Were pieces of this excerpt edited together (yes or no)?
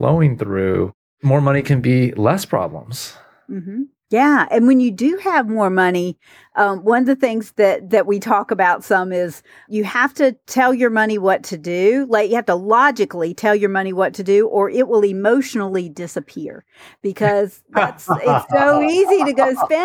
yes